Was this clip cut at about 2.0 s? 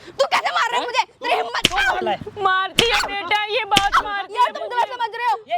yes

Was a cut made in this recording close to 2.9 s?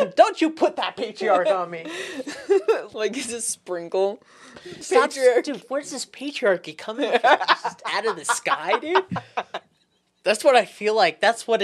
yes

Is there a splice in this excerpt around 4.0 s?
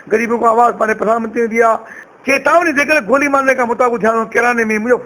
no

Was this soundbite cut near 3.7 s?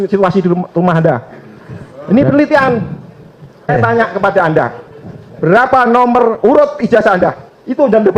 yes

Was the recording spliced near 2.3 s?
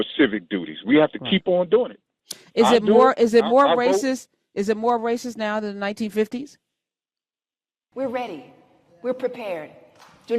no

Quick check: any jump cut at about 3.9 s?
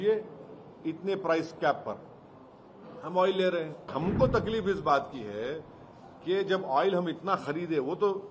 yes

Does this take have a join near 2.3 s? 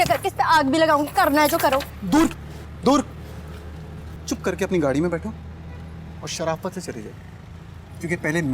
no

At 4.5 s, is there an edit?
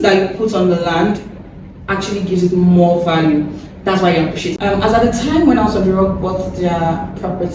yes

